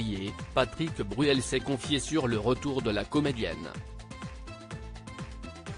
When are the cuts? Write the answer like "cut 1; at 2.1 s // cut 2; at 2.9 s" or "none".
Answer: cut 1; at 3.8 s